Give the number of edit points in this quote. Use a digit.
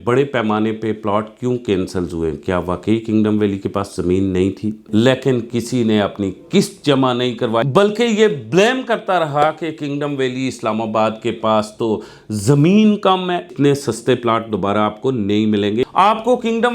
4